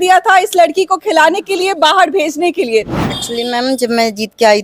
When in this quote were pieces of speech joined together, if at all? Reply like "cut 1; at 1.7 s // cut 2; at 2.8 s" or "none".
cut 1; at 3.0 s